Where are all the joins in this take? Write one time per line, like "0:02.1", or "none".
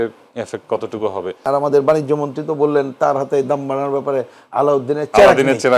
0:01.4